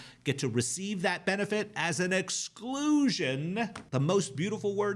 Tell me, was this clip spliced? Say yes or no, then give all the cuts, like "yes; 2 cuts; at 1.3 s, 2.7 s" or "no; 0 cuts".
yes; 1 cut; at 3.8 s